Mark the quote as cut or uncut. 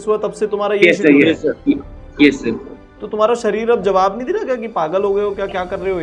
uncut